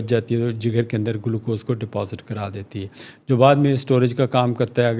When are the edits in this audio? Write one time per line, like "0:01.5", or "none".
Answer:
none